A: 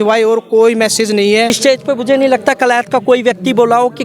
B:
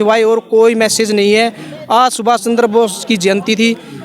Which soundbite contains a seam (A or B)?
A